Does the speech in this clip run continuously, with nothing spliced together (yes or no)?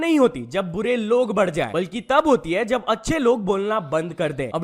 no